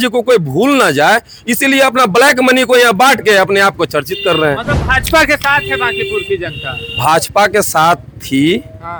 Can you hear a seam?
no; 0 cuts

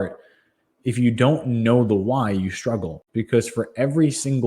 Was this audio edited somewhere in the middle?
yes; 1 cut; at 3.0 s

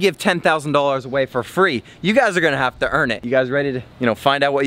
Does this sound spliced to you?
no; 0 cuts

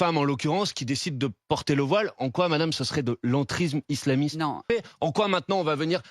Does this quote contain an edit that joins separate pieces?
yes; 1 cut; at 4.6 s

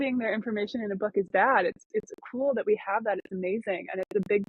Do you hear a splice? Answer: no; 0 cuts

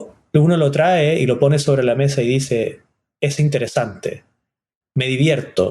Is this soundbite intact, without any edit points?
yes; 0 cuts

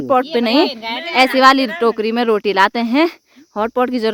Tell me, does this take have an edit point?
no; 0 cuts

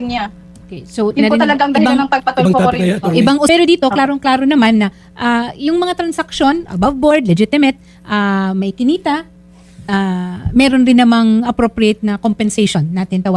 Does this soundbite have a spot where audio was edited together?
yes; 1 cut; at 3.5 s

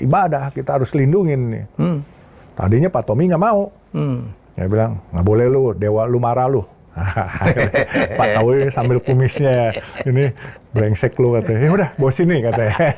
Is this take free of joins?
yes; 0 cuts

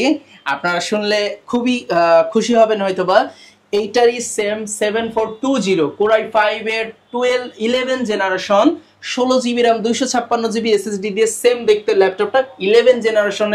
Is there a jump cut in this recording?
no; 0 cuts

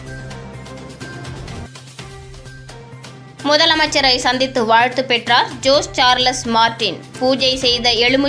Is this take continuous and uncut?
no; 1 cut; at 1.7 s

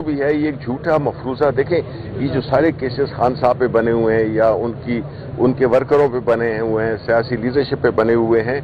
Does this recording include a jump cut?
no; 0 cuts

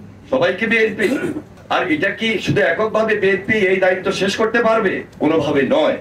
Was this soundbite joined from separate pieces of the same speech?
yes; 1 cut; at 1.6 s

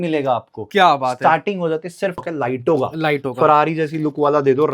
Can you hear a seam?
yes; 1 cut; at 2.3 s

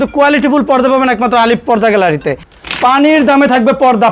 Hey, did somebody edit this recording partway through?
yes; 1 cut; at 2.5 s

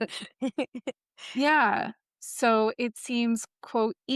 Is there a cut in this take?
yes; 1 cut; at 2.0 s

